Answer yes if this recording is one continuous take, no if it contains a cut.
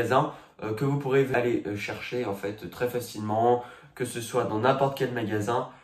no